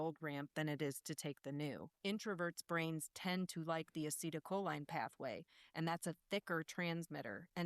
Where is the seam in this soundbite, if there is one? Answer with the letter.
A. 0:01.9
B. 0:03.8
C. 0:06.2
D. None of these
A